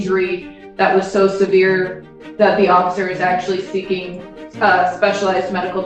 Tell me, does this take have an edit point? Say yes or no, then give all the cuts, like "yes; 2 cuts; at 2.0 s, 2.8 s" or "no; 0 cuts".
no; 0 cuts